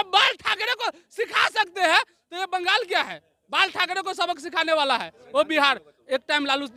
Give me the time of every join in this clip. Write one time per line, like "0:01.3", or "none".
none